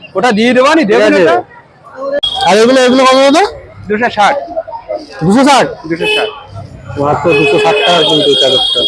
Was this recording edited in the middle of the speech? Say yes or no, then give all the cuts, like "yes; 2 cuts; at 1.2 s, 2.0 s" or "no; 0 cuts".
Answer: yes; 1 cut; at 2.2 s